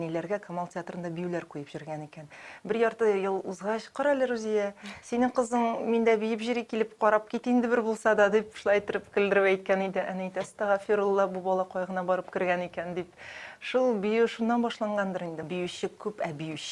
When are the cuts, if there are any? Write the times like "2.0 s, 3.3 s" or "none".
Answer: 15.4 s